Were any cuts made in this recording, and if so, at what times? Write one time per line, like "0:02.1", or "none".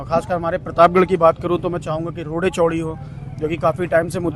none

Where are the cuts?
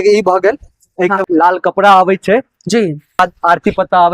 0:01.2
0:03.2

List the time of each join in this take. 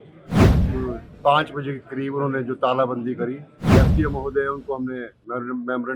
0:03.7

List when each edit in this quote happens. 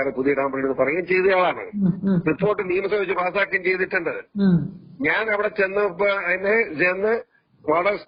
none

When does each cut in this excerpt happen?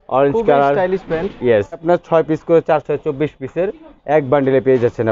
0:01.8

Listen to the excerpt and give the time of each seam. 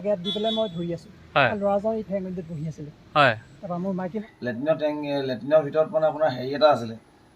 0:04.2

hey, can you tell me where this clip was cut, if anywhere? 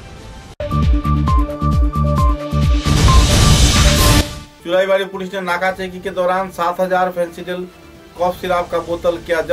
0:04.4

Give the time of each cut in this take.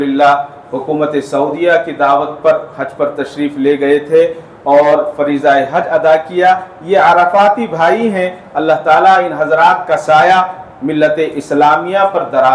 none

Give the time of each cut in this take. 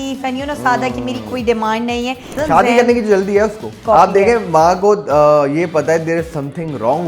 0:02.4
0:03.7

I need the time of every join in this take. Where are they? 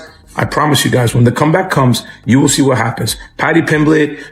none

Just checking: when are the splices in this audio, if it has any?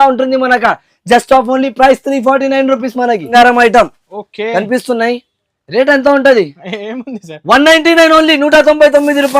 0:03.3

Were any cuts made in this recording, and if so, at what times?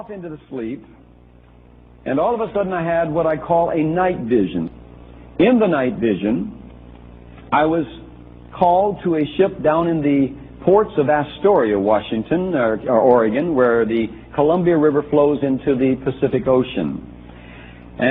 none

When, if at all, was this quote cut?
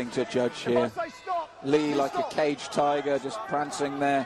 0:01.1

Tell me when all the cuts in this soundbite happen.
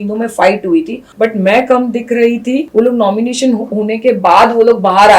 0:01.0
0:02.7

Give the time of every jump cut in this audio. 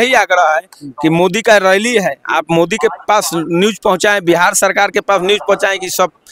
none

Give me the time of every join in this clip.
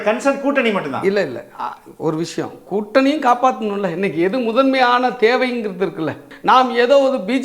0:06.3

